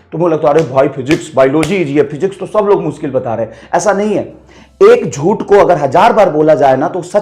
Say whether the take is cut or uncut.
uncut